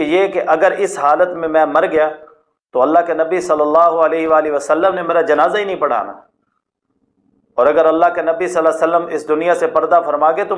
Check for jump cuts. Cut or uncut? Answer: uncut